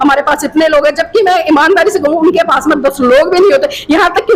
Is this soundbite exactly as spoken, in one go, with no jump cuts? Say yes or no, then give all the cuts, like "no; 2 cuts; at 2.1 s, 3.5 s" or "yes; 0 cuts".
yes; 0 cuts